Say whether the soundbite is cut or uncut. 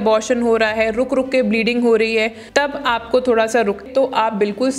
cut